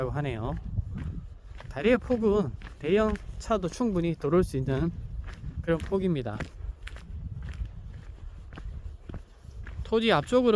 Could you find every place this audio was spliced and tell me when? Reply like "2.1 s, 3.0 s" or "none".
none